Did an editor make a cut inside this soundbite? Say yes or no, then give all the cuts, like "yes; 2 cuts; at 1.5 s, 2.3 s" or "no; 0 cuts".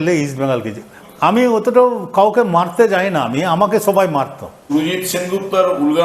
yes; 2 cuts; at 1.0 s, 4.7 s